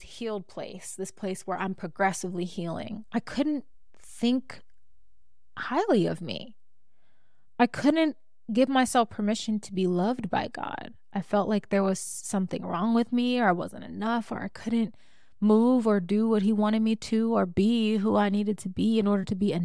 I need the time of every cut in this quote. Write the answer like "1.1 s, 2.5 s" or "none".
none